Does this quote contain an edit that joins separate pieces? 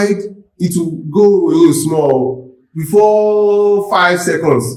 no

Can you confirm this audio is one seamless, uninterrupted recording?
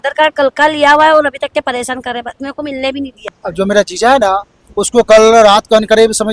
no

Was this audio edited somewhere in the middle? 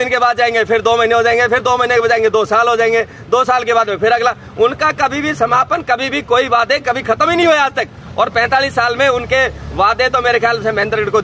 no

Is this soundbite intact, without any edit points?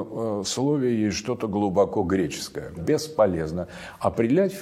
no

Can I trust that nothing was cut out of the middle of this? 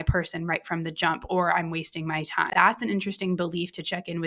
no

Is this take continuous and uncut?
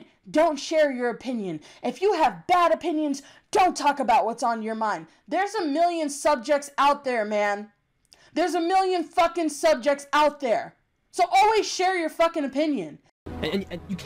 no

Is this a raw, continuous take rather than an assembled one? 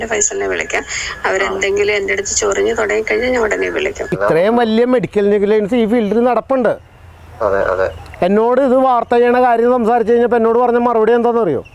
no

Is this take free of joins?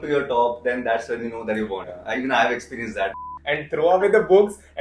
no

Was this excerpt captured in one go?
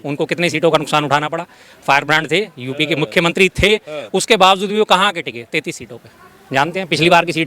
yes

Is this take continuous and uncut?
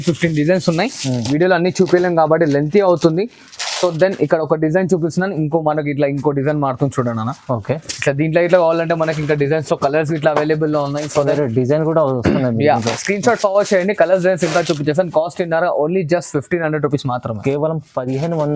yes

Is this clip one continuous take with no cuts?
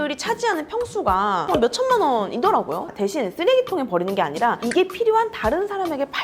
no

